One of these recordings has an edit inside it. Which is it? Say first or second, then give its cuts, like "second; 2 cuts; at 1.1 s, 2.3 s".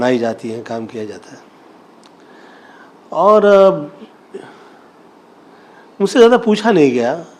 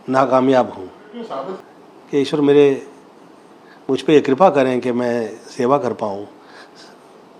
second; 1 cut; at 1.6 s